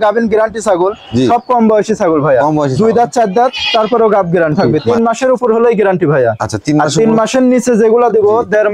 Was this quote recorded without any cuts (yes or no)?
no